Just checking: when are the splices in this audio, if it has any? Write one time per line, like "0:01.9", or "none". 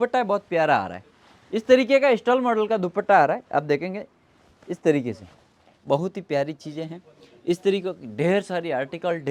none